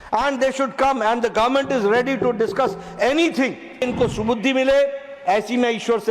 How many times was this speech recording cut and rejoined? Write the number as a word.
one